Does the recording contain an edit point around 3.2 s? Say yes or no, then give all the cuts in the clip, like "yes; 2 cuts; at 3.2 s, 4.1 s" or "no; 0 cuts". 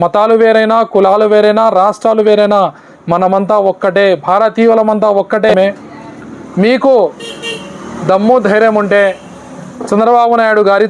no; 1 cut; at 5.5 s